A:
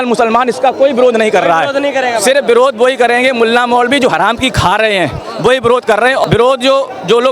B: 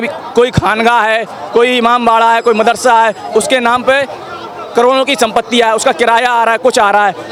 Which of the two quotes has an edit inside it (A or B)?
A